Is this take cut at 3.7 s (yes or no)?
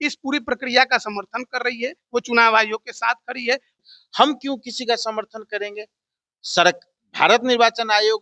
yes